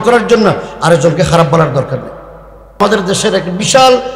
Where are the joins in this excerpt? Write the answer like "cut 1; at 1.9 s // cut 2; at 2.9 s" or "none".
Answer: cut 1; at 2.8 s